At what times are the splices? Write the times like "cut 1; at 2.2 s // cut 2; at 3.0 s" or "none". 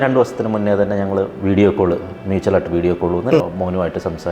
cut 1; at 3.4 s